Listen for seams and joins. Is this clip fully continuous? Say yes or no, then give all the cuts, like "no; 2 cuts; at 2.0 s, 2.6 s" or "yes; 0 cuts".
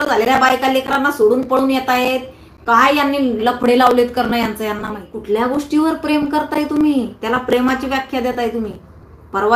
no; 1 cut; at 5.1 s